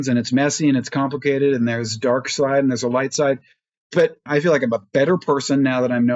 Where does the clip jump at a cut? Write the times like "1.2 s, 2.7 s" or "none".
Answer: 4.3 s